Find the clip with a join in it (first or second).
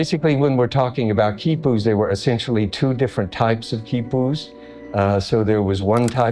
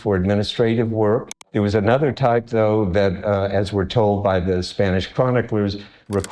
second